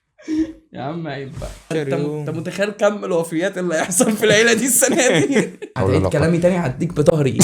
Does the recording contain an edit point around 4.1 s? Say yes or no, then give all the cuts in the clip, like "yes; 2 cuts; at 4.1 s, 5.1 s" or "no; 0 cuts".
no; 2 cuts; at 1.7 s, 5.7 s